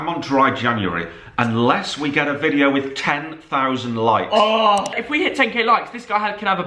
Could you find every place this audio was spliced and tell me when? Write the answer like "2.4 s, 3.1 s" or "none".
5.0 s